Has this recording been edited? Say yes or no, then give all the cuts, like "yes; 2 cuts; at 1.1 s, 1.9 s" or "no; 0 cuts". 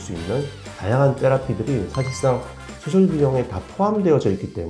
no; 0 cuts